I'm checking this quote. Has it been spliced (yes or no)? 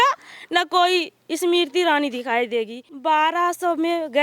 yes